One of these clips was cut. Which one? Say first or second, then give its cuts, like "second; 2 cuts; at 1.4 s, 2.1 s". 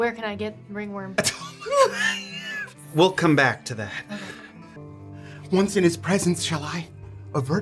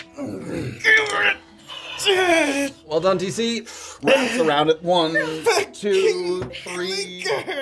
first; 1 cut; at 4.8 s